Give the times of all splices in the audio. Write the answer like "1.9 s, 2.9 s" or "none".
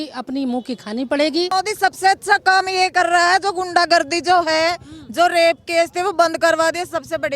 1.5 s